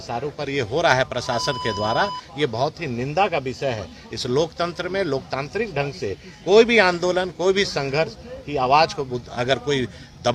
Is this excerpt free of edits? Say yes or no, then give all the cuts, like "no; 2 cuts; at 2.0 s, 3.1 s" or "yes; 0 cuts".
yes; 0 cuts